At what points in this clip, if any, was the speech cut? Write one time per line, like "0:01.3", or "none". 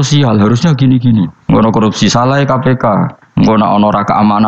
0:01.4
0:03.2